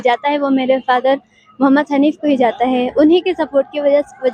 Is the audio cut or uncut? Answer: uncut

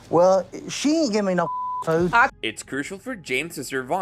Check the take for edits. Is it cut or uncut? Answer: uncut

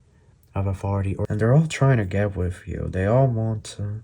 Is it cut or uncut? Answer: cut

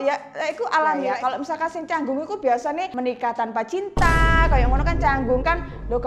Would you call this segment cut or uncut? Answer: cut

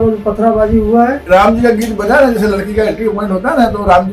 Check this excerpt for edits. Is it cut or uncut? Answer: cut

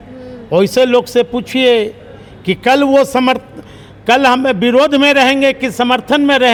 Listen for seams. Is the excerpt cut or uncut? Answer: uncut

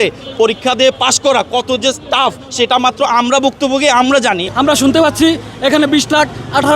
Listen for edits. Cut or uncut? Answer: cut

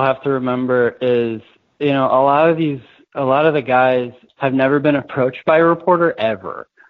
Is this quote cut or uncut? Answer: cut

